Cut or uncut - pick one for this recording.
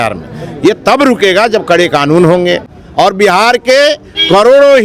cut